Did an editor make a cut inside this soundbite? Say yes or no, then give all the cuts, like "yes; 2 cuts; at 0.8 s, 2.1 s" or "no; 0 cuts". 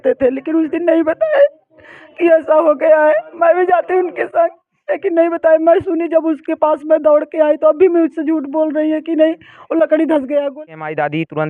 yes; 1 cut; at 10.5 s